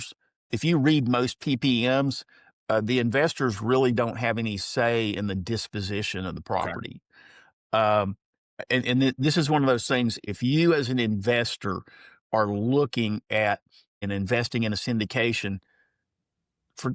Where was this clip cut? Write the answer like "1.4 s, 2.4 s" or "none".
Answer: 10.2 s, 14.0 s